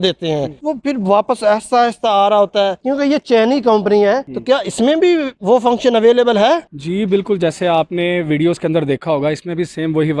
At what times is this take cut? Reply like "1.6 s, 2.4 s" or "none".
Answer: none

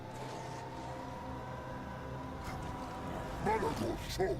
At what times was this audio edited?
none

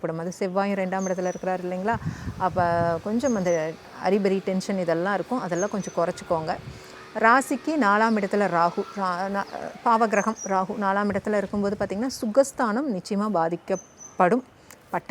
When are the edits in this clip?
none

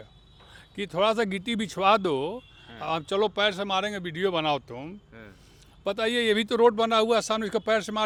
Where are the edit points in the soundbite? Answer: none

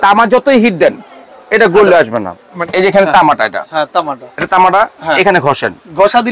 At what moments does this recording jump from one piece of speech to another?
2.6 s

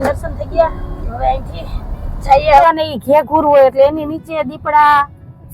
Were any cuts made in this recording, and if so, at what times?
2.6 s

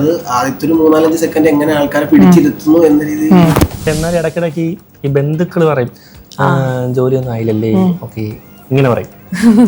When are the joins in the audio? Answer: 3.8 s

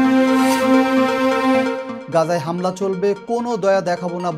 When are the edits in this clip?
none

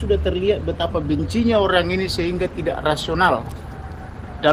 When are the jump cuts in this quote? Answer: none

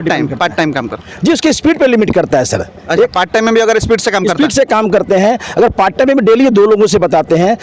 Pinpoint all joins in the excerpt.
none

